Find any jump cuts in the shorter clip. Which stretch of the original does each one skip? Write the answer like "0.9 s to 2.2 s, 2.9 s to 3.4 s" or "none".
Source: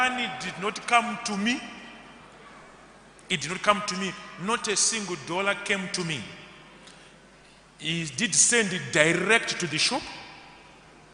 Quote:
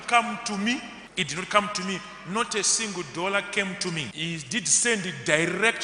1.8 s to 3.1 s, 6.2 s to 7.8 s

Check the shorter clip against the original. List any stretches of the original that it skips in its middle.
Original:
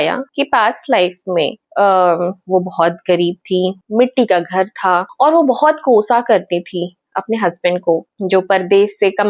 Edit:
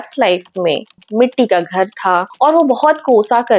1.7 s to 3.8 s

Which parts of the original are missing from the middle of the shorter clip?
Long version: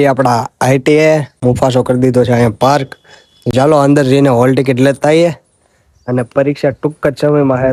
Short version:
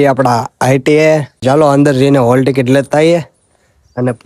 1.3 s to 3.4 s

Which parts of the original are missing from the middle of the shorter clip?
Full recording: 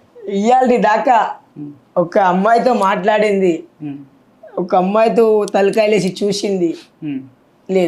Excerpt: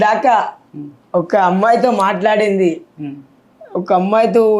none

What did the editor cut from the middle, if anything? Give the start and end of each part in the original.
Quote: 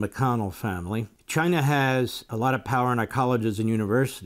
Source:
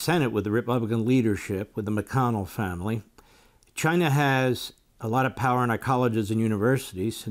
3.1 s to 3.7 s, 4.7 s to 4.9 s

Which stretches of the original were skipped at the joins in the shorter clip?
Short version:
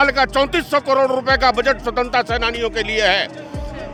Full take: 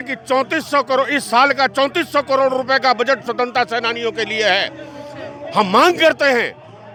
none

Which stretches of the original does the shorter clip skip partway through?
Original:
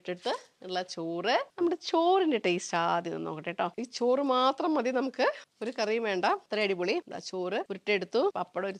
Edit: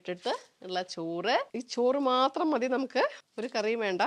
1.5 s to 3.7 s

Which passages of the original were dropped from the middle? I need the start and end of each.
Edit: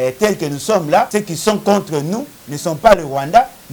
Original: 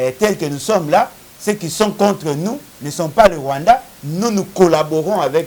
1.1 s to 1.4 s

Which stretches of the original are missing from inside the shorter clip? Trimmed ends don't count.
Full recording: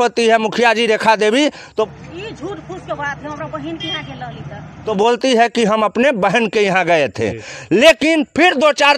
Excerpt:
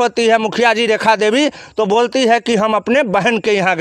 1.7 s to 4.8 s

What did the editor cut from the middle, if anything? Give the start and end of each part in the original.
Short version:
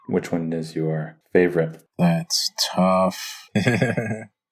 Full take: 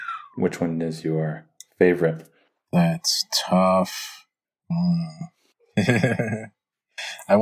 1.4 s to 1.6 s, 2.3 s to 2.6 s, 4.1 s to 5.5 s

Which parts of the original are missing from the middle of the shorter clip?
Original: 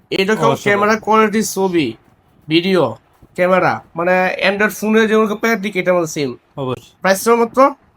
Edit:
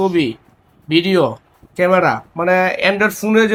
none

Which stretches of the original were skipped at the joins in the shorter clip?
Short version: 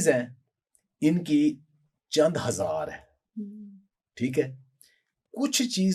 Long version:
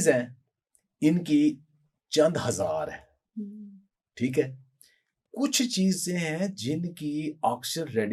none

